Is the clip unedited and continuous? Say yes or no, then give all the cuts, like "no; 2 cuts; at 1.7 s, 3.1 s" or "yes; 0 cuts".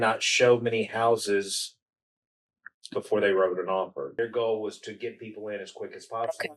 no; 1 cut; at 4.1 s